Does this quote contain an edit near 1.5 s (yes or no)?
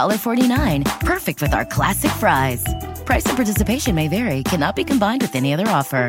no